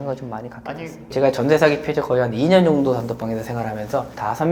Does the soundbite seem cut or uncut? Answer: uncut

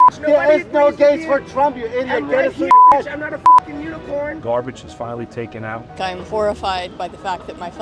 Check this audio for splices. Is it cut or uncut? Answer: cut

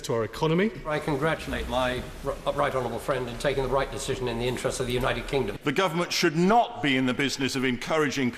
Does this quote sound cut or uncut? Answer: cut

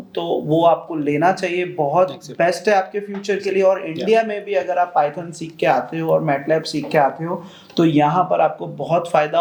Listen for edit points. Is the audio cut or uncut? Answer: uncut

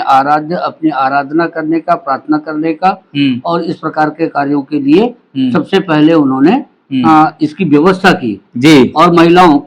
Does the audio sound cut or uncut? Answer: uncut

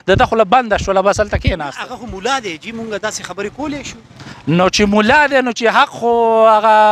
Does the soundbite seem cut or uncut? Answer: uncut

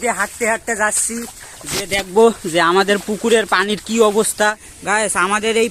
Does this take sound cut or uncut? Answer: cut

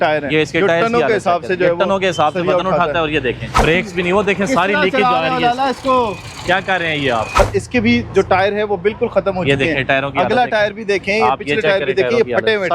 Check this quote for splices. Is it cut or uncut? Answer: cut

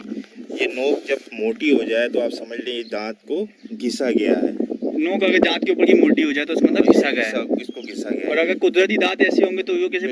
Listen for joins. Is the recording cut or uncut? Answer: uncut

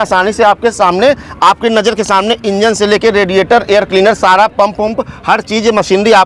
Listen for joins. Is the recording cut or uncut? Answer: uncut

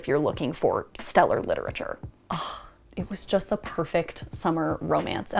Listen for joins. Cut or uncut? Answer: cut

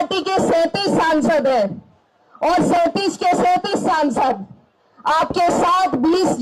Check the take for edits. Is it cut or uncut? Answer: uncut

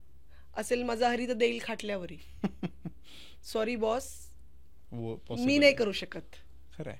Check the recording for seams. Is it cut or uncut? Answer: uncut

